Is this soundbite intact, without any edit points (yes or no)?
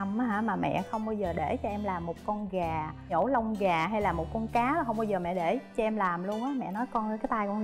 yes